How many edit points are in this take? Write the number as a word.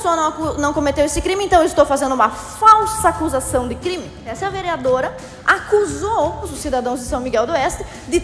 two